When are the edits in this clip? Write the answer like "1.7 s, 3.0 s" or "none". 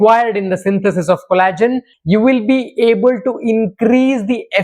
1.9 s